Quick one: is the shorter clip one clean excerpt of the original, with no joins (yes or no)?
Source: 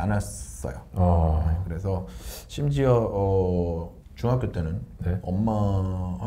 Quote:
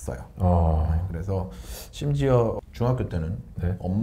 no